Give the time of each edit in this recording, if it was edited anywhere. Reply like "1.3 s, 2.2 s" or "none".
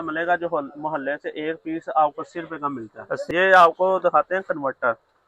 3.2 s